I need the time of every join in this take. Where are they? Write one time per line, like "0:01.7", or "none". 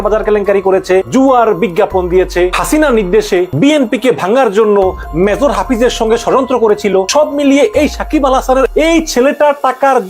0:02.6
0:03.5
0:07.1